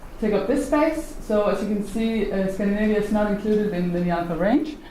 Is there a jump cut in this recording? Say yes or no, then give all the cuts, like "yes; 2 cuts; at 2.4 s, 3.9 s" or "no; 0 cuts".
yes; 1 cut; at 1.7 s